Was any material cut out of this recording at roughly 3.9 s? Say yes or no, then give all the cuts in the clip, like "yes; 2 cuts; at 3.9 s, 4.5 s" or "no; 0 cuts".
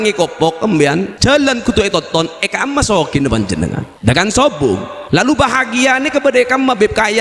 yes; 3 cuts; at 1.1 s, 3.9 s, 4.9 s